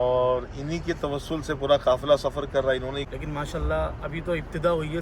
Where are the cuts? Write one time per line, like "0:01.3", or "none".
0:03.1